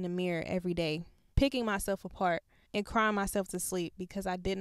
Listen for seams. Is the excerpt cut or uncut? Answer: cut